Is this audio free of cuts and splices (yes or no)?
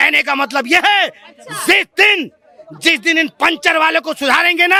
yes